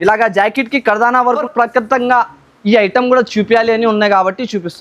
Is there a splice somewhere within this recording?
yes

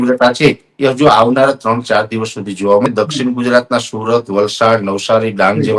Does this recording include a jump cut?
yes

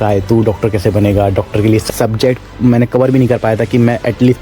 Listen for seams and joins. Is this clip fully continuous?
no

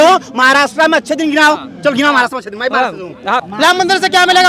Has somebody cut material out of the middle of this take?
yes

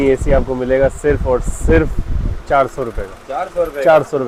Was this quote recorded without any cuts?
yes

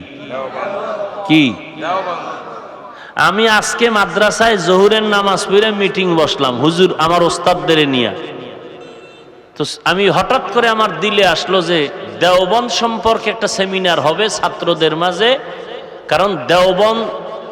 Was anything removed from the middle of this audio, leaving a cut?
yes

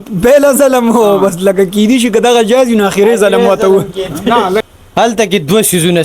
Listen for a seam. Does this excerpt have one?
yes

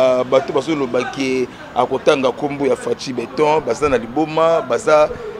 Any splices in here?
no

